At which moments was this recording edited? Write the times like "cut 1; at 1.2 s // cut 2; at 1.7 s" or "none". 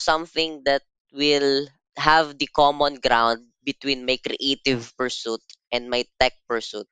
cut 1; at 1.8 s